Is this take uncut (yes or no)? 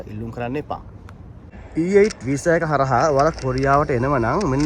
no